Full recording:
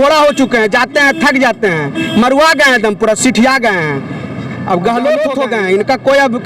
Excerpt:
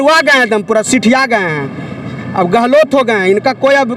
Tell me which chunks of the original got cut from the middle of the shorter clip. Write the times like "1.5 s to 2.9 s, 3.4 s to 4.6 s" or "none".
5.1 s to 5.2 s

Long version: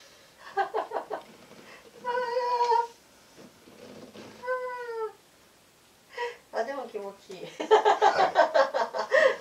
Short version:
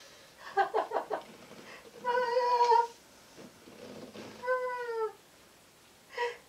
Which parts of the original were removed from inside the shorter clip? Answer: none

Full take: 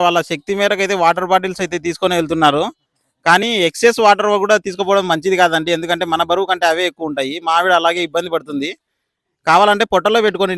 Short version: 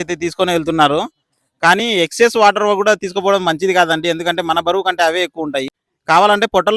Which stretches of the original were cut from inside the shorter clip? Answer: 7.3 s to 9.1 s

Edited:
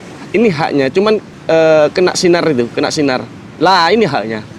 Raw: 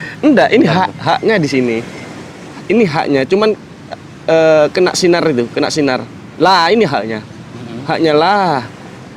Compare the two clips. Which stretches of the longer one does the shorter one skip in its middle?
3.7 s to 4.1 s

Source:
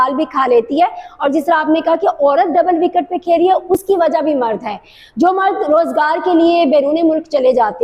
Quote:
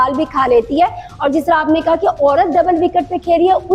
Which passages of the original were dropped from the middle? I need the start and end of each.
none

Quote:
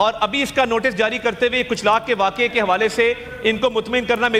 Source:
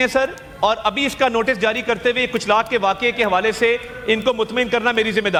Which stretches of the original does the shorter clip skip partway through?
none

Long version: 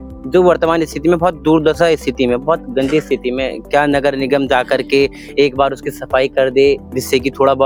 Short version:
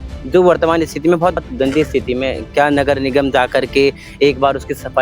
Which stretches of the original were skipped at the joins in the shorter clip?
1.4 s to 2.6 s

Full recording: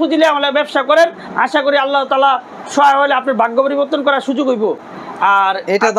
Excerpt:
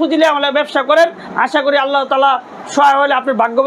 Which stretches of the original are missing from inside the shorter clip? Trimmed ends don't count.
none

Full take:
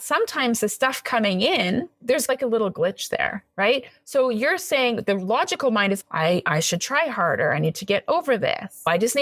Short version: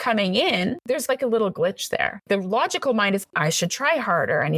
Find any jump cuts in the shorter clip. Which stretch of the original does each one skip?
1.9 s to 2.0 s, 3.4 s to 5.0 s, 6.1 s to 6.4 s

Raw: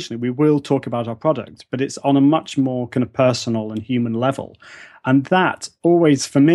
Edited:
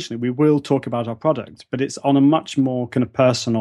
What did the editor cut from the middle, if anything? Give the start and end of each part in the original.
none

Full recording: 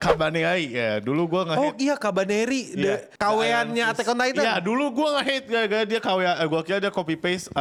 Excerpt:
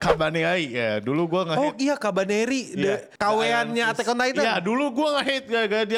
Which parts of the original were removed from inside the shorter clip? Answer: none

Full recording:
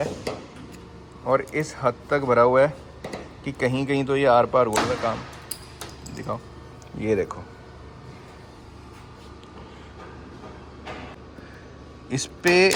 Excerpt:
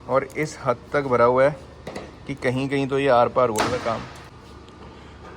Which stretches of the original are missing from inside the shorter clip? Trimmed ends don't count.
5.5 s to 9.1 s

